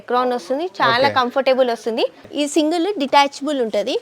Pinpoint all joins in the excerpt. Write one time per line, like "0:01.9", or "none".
0:02.2